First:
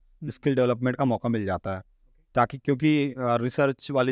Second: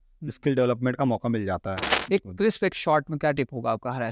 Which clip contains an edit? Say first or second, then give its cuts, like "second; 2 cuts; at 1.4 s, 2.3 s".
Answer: second; 1 cut; at 1.9 s